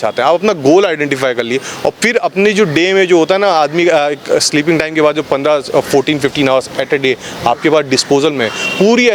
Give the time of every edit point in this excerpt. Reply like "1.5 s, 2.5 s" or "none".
none